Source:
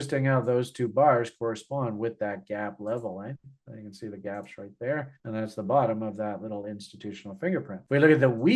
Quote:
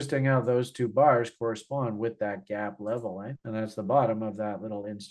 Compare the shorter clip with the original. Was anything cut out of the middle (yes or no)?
yes